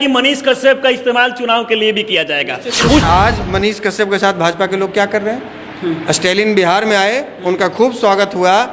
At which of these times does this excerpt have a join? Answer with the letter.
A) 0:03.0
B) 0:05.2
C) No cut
A